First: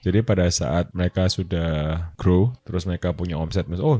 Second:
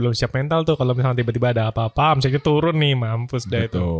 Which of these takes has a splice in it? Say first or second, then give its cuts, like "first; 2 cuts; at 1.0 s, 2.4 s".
first; 3 cuts; at 0.9 s, 2.1 s, 2.6 s